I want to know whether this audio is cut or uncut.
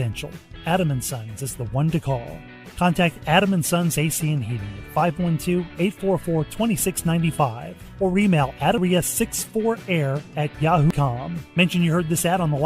cut